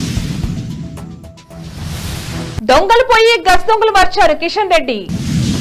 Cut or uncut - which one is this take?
cut